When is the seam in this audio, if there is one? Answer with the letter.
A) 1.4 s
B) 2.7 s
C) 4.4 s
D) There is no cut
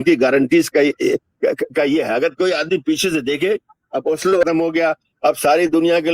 C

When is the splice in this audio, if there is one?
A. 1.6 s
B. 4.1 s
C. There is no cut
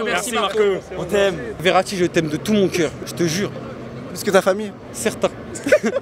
A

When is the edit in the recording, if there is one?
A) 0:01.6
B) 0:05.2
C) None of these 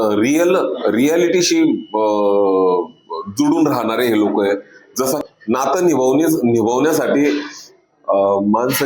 B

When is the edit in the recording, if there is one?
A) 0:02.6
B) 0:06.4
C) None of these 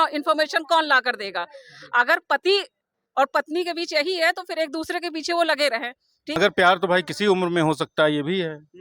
B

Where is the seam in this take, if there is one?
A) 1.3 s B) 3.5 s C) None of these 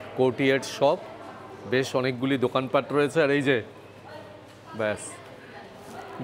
C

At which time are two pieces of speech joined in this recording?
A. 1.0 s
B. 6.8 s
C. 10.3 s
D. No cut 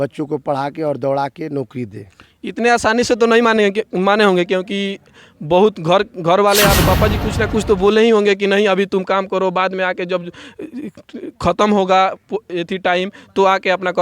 B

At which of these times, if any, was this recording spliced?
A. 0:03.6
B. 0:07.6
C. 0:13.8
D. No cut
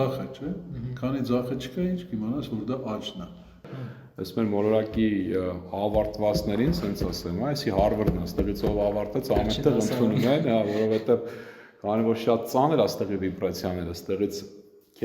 A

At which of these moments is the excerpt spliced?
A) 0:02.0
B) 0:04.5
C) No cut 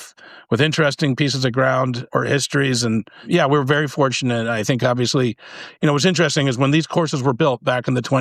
A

